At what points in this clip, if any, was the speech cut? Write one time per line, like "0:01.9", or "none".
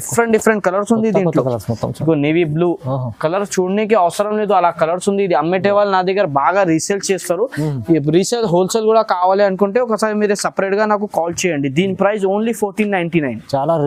none

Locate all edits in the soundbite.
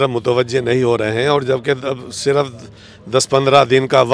none

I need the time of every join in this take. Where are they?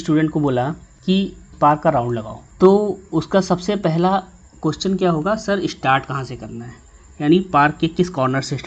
none

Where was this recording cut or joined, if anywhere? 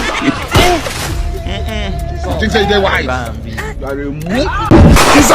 0:04.2

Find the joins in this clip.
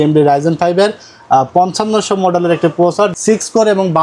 none

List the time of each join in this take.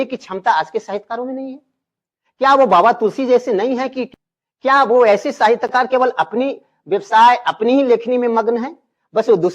0:04.2

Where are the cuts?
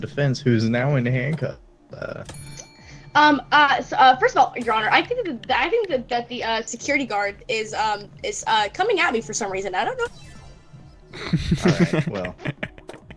none

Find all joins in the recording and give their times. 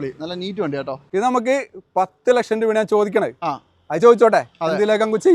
0:01.1

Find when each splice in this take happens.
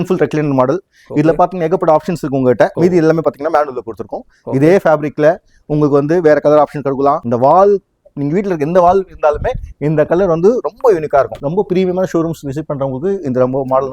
0:02.7
0:07.2
0:11.4

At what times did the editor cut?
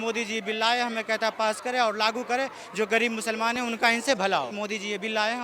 0:04.5

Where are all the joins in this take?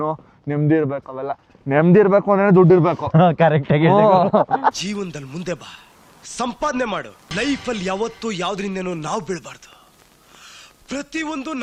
none

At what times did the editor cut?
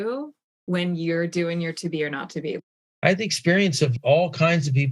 0:02.6

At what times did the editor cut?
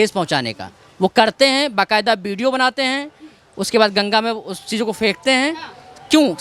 none

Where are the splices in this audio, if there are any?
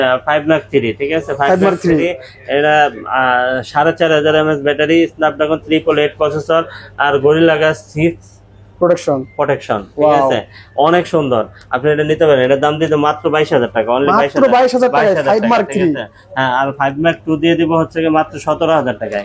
none

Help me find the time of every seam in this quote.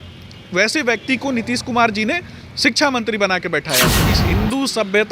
0:04.1

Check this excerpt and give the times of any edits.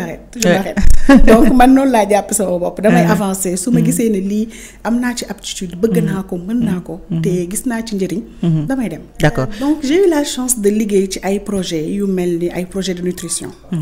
0:09.5

